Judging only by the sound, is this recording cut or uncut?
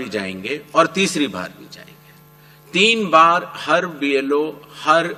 uncut